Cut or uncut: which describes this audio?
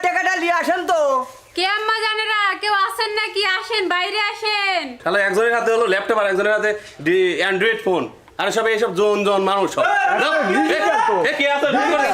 cut